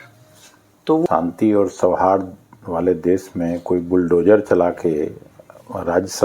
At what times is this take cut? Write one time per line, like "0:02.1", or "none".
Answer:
0:01.1